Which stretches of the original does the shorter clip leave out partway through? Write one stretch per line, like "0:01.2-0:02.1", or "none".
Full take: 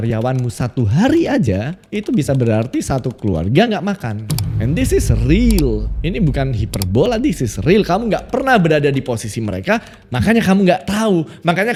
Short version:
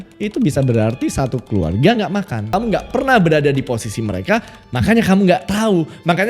0:04.2-0:07.9